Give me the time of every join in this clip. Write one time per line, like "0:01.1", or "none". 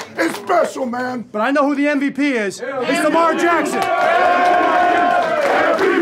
0:01.2